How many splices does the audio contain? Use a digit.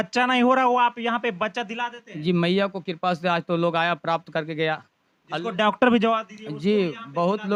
0